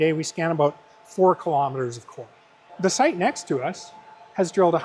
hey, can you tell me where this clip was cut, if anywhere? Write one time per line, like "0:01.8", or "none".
0:02.7